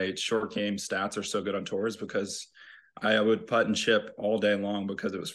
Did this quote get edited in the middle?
no; 0 cuts

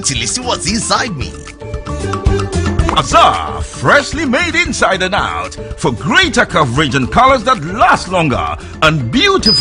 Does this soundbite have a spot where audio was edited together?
yes; 1 cut; at 2.9 s

